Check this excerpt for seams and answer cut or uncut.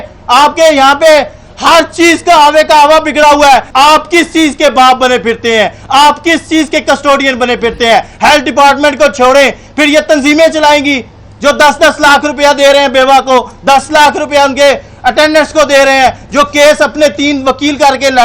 cut